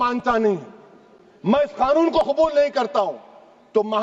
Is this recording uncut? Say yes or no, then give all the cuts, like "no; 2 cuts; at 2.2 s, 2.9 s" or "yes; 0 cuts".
yes; 0 cuts